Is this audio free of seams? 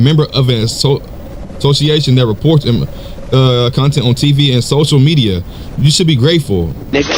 yes; 0 cuts

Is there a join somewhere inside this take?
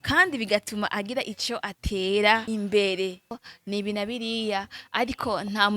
yes; 2 cuts; at 2.4 s, 3.4 s

